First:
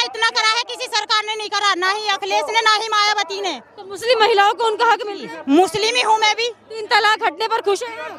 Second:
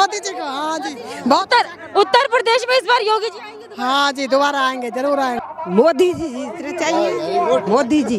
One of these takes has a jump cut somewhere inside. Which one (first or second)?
second